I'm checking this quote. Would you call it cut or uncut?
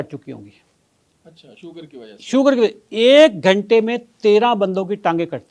uncut